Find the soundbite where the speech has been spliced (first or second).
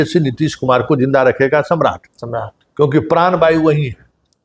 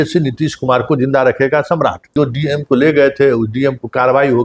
second